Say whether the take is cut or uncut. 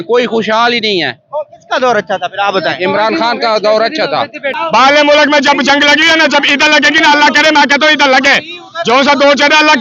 cut